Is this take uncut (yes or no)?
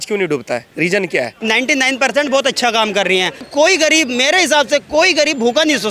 no